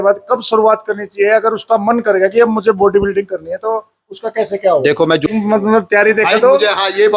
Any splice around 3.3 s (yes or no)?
no